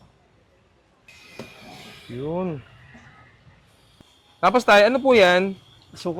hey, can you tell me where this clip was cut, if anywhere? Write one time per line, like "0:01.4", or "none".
0:01.1